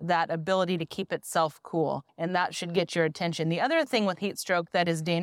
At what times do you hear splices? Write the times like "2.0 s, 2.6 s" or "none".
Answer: 2.1 s